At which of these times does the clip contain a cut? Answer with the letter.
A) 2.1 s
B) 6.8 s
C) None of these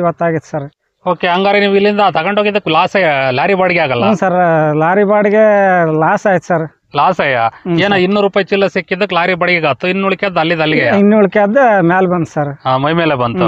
C